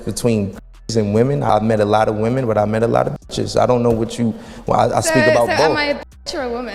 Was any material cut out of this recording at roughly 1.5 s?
yes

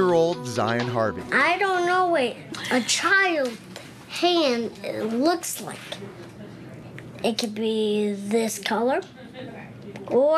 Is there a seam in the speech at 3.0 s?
yes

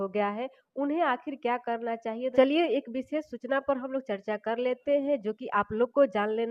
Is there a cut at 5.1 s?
no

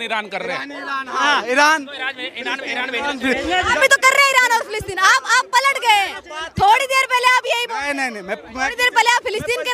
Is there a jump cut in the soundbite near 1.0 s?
no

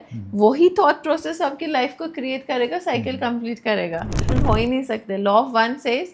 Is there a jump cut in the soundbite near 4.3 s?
yes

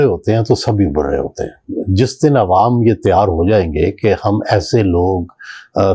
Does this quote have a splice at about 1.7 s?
yes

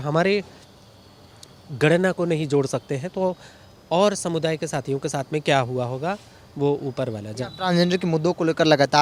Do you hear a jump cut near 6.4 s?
no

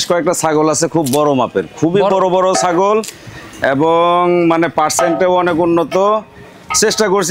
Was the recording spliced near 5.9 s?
no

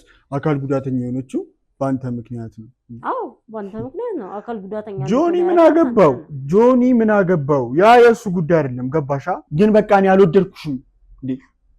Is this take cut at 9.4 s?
yes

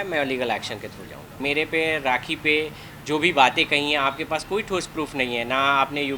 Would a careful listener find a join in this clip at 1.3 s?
yes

